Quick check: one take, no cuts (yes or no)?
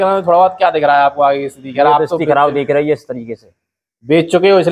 yes